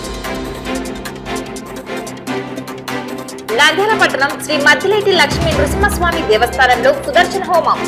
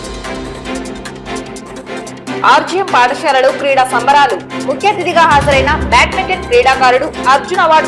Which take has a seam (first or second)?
second